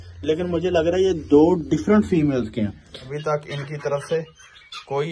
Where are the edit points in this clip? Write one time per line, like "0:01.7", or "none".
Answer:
0:03.1